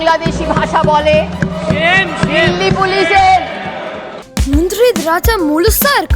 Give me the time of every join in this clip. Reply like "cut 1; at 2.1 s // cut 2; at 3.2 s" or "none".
cut 1; at 4.3 s

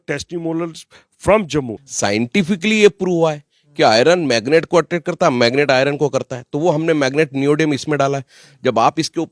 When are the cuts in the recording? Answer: cut 1; at 1.8 s

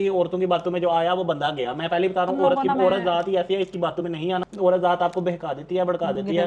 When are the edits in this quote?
none

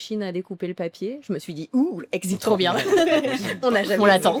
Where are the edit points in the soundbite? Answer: none

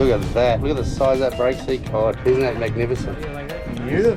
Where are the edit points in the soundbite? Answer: none

